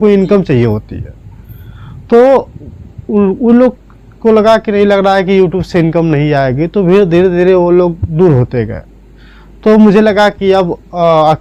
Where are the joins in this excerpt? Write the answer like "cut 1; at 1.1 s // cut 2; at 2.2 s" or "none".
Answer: none